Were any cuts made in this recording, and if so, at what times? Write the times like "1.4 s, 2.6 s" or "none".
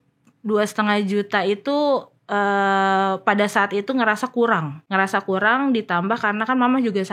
4.8 s

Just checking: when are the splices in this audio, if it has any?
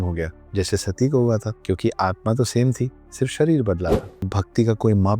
1.5 s, 4.1 s

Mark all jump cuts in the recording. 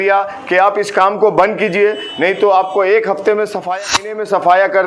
3.8 s

